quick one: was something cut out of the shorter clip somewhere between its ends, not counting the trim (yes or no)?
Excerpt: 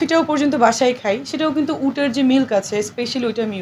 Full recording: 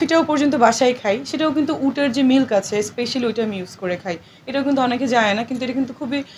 no